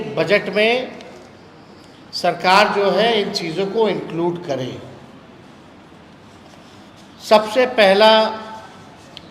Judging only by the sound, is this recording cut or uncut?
uncut